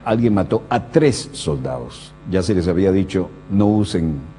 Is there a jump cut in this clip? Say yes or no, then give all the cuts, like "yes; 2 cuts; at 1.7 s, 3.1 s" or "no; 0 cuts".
yes; 1 cut; at 3.1 s